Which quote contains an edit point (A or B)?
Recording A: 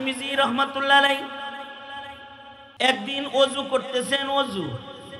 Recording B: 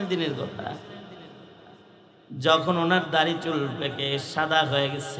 A